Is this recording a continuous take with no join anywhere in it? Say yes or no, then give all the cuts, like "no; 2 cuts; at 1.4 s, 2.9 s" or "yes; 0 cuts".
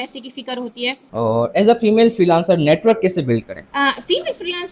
no; 2 cuts; at 1.0 s, 3.6 s